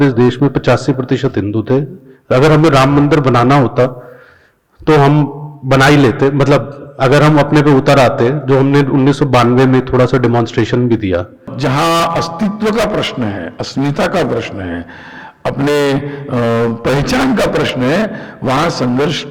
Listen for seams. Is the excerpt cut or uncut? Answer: cut